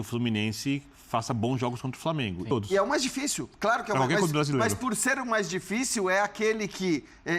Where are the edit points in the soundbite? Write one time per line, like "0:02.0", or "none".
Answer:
0:02.5